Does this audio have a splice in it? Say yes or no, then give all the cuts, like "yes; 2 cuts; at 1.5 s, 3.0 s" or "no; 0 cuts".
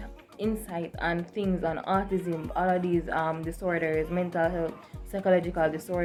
no; 0 cuts